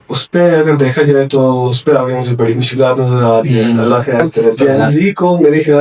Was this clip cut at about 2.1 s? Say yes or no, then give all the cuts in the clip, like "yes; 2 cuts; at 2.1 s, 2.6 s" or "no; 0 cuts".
no; 1 cut; at 4.6 s